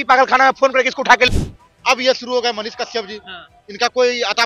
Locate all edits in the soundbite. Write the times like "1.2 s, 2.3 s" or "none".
1.3 s